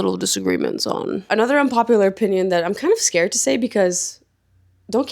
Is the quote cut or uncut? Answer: cut